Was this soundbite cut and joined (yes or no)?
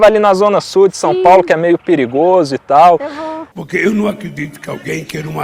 no